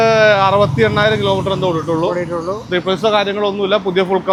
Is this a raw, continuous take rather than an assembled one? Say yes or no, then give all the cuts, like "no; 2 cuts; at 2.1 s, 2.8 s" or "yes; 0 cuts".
yes; 0 cuts